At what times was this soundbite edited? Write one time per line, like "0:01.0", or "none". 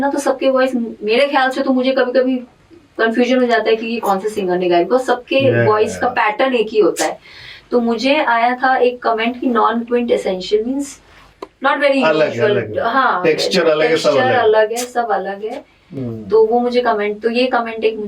none

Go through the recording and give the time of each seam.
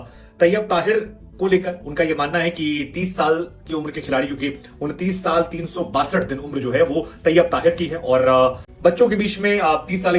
0:08.7

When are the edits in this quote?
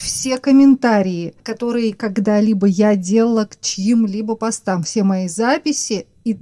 none

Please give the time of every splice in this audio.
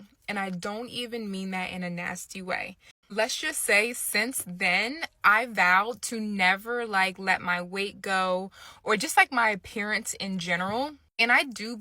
0:03.0

